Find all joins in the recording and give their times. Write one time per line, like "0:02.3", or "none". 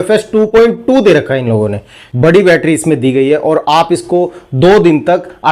0:02.0